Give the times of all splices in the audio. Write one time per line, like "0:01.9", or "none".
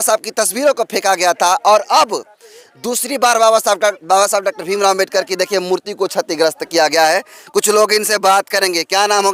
none